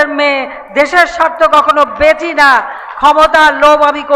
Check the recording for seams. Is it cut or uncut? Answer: uncut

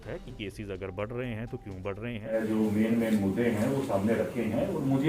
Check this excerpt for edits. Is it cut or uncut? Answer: cut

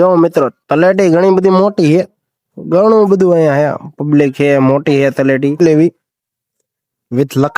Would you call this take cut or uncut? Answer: cut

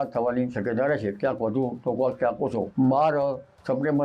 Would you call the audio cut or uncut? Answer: cut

